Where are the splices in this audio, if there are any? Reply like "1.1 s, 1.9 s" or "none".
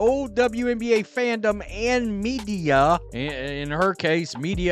3.1 s